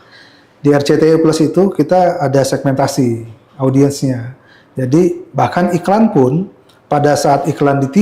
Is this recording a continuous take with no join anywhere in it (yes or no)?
yes